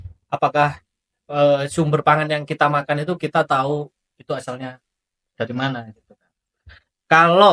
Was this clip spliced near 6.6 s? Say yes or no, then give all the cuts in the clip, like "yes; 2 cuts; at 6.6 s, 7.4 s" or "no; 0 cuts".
no; 0 cuts